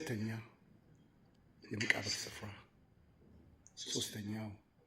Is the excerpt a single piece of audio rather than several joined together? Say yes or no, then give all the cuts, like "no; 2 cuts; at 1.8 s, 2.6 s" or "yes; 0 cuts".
yes; 0 cuts